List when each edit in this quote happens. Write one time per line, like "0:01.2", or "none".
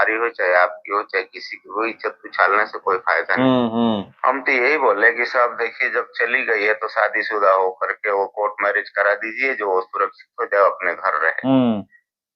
0:04.1